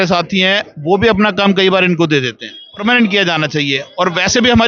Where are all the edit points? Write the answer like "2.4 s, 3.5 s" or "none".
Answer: 2.8 s